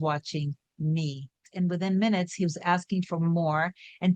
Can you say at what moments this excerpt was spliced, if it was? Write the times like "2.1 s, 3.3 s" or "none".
1.4 s